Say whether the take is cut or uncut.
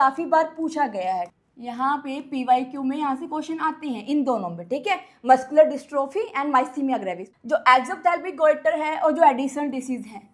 cut